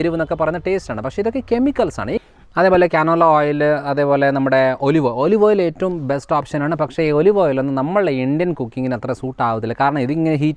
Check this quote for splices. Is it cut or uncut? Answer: cut